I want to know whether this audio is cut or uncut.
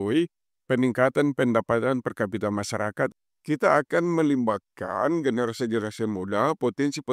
cut